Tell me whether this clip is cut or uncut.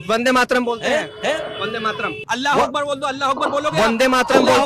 cut